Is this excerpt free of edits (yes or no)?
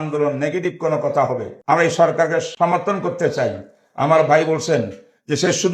no